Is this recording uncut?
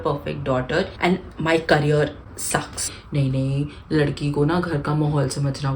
no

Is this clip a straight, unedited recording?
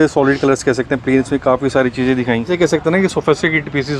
no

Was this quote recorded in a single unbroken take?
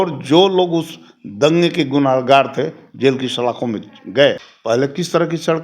no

